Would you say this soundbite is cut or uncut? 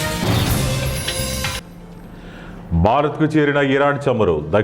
cut